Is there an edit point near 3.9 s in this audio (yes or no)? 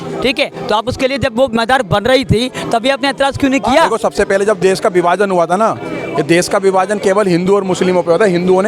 yes